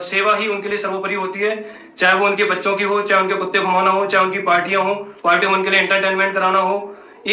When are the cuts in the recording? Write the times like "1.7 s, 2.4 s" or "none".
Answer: none